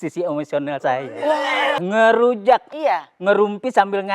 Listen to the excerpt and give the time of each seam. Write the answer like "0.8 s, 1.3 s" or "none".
1.8 s